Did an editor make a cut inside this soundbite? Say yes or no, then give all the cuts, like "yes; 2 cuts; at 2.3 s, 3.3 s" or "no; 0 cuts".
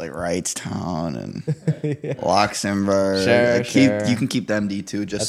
no; 0 cuts